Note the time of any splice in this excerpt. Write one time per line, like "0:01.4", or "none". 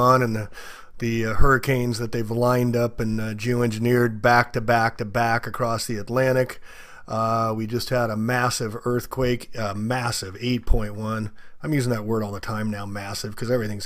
none